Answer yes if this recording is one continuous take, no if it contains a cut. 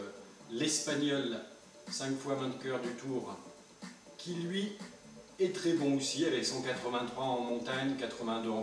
no